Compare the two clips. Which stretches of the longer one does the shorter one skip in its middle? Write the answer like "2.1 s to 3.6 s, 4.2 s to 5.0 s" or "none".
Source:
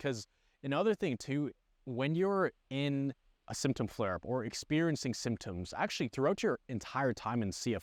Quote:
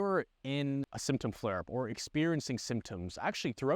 3.2 s to 3.5 s